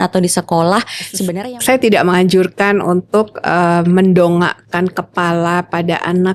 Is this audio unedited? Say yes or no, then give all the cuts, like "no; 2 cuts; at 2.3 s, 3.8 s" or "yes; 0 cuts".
no; 1 cut; at 1.2 s